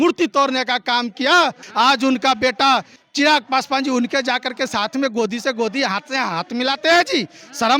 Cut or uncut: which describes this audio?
cut